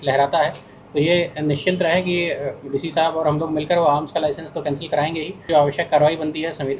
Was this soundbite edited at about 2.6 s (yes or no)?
no